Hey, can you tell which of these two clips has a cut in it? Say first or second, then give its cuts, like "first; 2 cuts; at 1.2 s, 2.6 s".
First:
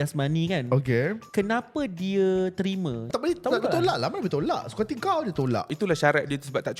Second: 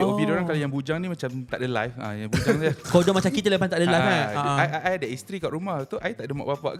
first; 3 cuts; at 1.2 s, 3.1 s, 5.7 s